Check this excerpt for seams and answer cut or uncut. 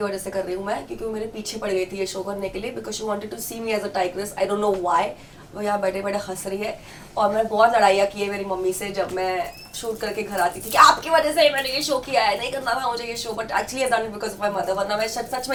uncut